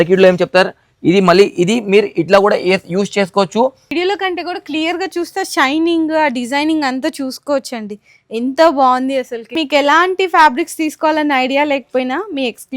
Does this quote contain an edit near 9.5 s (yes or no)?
yes